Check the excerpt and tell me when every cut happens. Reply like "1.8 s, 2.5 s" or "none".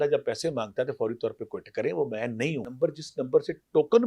2.6 s